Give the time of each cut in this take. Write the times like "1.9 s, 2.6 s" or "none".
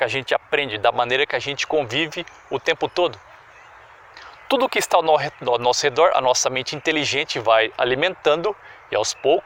none